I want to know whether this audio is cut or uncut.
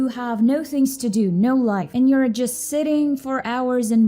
cut